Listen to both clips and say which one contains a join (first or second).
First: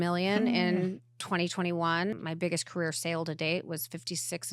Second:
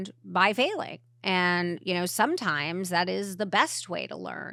first